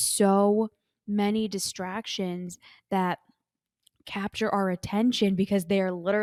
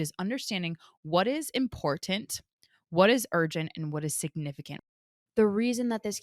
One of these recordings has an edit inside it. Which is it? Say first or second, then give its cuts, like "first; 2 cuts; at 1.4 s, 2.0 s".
second; 1 cut; at 4.8 s